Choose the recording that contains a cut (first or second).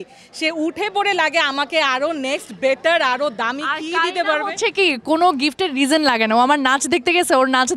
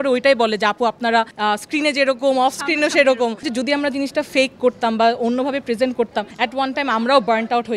second